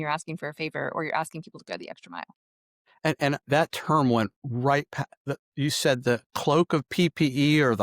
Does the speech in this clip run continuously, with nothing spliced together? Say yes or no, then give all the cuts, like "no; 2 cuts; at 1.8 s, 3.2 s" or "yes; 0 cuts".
no; 1 cut; at 3.4 s